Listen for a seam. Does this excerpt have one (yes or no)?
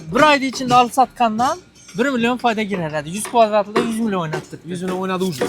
no